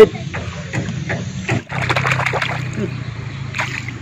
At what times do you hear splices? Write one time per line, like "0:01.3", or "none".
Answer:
0:01.6

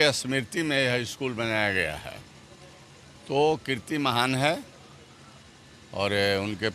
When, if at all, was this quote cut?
none

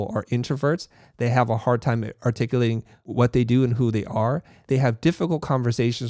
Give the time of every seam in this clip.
0:02.9
0:04.6

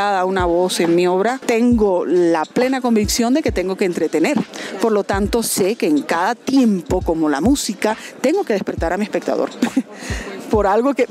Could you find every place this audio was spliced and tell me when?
0:01.4
0:04.6

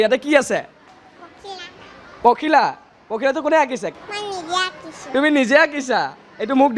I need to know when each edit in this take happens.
0:03.9

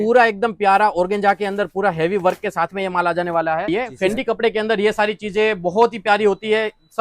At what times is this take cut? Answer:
0:03.7

